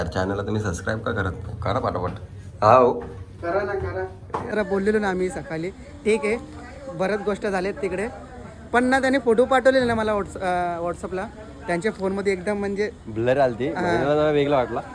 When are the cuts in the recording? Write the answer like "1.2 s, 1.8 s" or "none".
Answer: 4.5 s